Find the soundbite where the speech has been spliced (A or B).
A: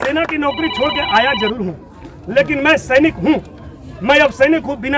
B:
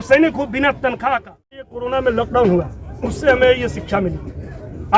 B